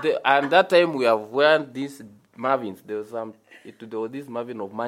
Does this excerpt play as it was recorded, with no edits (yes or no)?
yes